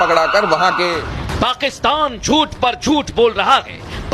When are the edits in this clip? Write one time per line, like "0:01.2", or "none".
0:01.0